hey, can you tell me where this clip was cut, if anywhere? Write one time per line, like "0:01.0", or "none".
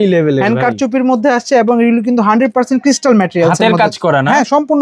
none